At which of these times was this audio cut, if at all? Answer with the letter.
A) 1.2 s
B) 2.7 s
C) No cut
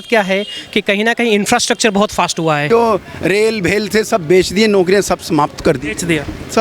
B